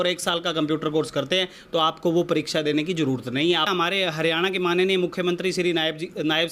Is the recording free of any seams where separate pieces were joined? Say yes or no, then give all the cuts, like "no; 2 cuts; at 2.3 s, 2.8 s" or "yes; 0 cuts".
no; 1 cut; at 3.7 s